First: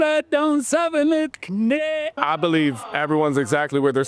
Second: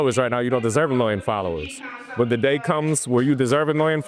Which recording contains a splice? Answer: first; 1 cut; at 2.1 s

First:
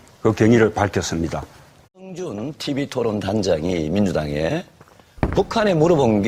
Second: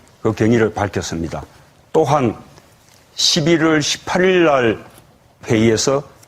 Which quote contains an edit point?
second; 1 cut; at 1.7 s

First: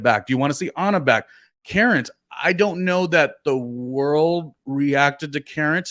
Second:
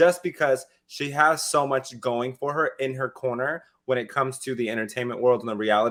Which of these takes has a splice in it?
first; 1 cut; at 1.6 s

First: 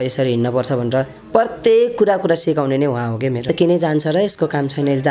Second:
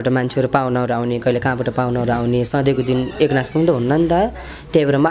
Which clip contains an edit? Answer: first; 1 cut; at 3.5 s

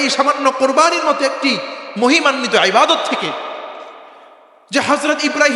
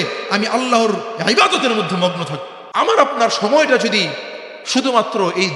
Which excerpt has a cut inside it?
second; 1 cut; at 2.7 s

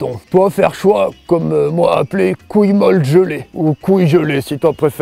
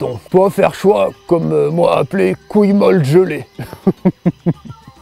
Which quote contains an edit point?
first; 1 cut; at 3.4 s

